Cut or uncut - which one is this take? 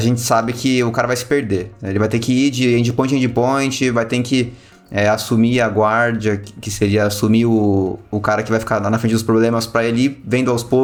uncut